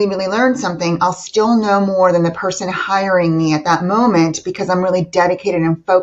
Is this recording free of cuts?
yes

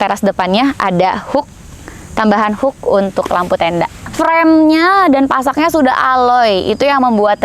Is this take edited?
yes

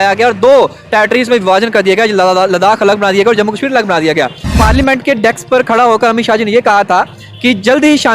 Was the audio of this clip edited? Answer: yes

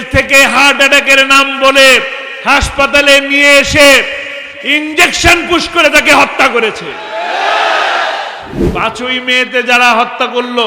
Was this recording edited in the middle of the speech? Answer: yes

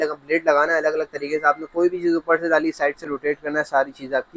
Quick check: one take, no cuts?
yes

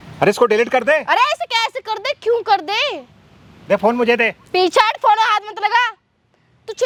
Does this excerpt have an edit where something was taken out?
no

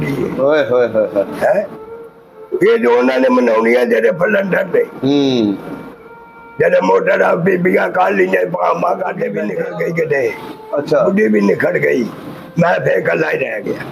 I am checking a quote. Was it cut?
yes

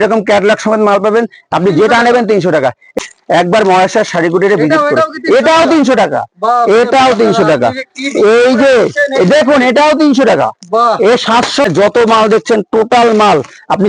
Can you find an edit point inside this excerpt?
yes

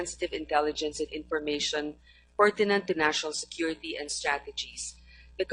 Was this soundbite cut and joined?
no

